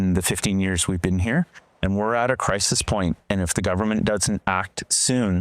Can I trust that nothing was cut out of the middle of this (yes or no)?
no